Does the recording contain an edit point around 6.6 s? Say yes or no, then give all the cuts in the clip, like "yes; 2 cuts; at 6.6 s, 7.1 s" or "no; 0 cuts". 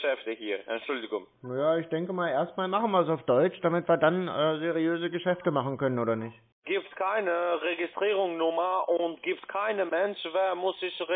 yes; 1 cut; at 6.6 s